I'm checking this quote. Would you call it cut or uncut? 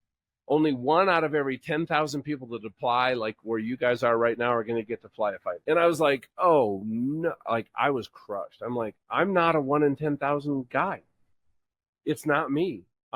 cut